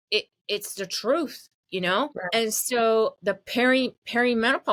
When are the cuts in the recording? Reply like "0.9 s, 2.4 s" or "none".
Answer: none